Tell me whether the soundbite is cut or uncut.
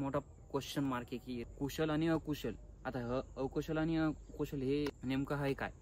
cut